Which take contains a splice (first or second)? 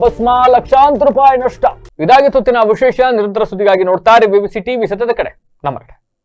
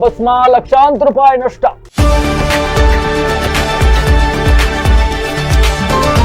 second